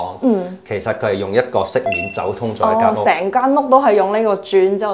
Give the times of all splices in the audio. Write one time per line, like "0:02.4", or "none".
none